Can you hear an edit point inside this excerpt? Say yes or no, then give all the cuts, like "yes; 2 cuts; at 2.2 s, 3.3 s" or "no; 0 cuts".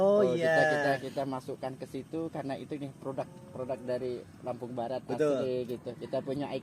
no; 0 cuts